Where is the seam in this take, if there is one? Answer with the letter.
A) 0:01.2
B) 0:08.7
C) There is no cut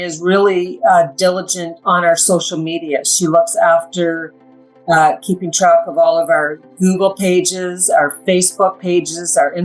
C